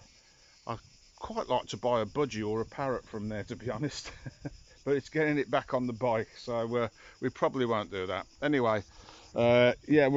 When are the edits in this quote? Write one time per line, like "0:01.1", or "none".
none